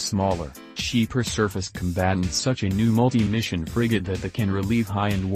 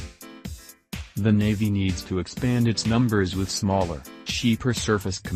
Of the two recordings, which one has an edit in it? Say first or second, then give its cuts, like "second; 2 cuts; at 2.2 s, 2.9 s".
second; 1 cut; at 1.1 s